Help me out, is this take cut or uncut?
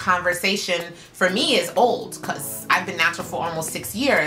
uncut